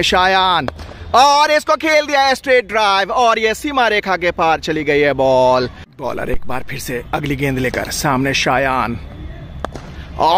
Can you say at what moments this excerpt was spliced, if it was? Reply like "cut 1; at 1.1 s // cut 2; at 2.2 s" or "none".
cut 1; at 5.9 s